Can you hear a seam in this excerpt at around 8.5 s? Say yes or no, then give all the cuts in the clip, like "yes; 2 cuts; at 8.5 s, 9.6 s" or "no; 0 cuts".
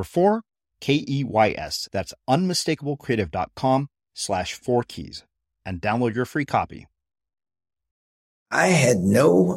yes; 1 cut; at 8.5 s